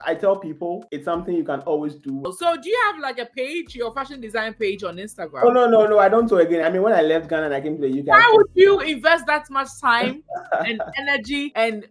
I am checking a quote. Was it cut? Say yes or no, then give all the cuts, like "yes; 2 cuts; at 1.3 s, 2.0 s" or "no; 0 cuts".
yes; 1 cut; at 2.3 s